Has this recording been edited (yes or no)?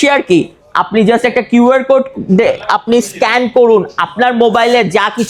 no